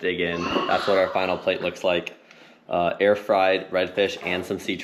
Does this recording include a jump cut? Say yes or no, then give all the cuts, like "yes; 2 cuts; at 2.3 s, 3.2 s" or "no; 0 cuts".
no; 0 cuts